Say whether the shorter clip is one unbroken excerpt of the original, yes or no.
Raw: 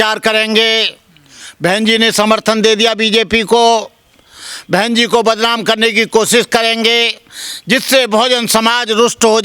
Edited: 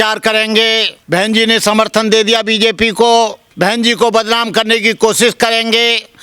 no